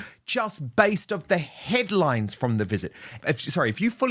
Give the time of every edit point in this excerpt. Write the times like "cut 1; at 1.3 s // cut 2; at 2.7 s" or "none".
cut 1; at 3.2 s